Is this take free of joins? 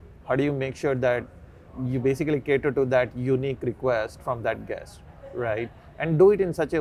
yes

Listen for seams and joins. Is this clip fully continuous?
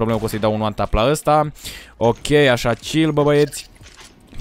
yes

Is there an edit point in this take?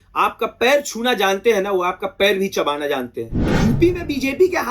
yes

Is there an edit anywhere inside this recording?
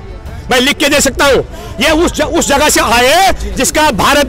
no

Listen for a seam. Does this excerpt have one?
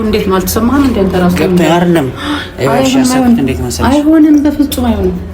no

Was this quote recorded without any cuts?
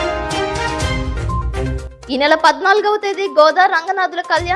yes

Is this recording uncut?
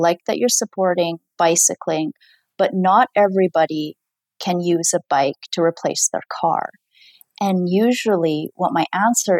yes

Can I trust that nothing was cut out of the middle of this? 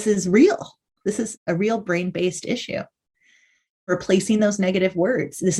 no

